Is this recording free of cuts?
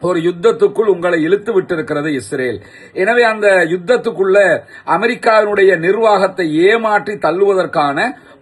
yes; 0 cuts

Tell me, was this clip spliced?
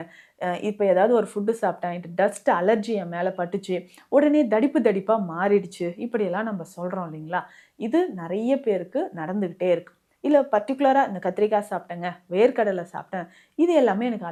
no; 0 cuts

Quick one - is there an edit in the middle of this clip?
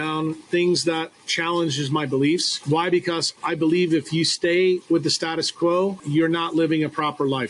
yes; 3 cuts; at 2.5 s, 3.3 s, 6.0 s

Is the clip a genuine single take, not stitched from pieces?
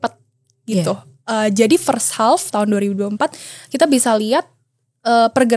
yes; 0 cuts

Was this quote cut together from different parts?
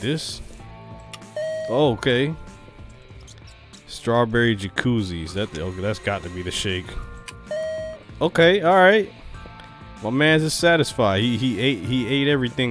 no; 0 cuts

